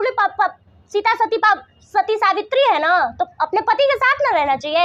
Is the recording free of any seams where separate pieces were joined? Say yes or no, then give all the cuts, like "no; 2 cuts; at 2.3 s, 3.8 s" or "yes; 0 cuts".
yes; 0 cuts